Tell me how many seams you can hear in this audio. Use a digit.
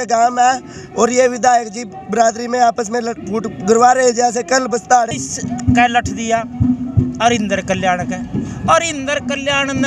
1